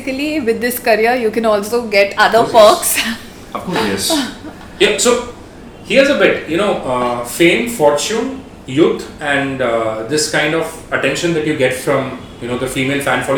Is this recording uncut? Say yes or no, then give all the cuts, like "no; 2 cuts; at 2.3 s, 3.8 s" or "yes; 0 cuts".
yes; 0 cuts